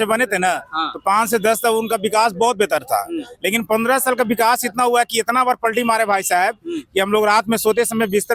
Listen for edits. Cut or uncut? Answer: uncut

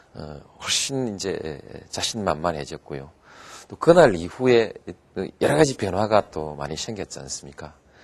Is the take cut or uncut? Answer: uncut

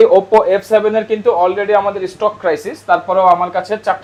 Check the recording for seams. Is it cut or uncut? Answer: uncut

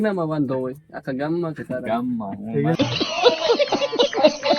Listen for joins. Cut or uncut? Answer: cut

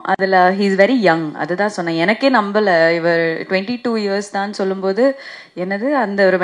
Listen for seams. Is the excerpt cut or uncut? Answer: uncut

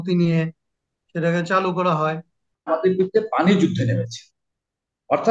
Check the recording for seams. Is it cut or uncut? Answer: cut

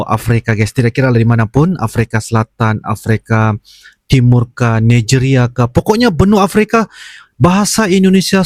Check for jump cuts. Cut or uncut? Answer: uncut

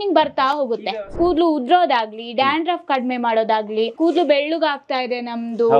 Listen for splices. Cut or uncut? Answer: cut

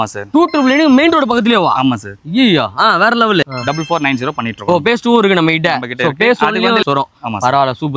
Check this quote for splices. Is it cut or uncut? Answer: cut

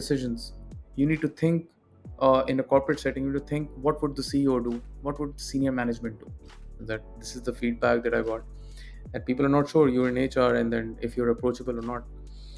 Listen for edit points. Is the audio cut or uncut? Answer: cut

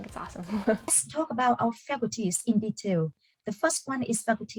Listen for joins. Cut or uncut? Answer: cut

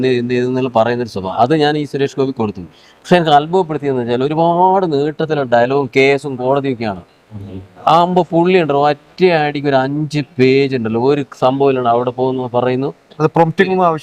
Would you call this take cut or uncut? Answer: uncut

